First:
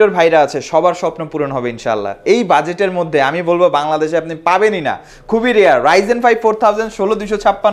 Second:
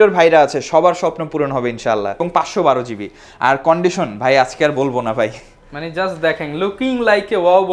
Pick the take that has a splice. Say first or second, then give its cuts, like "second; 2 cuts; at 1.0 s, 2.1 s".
second; 1 cut; at 2.2 s